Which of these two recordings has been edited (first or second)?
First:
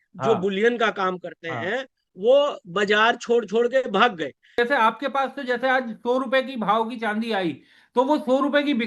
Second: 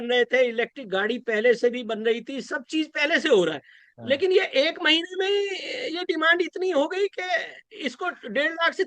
first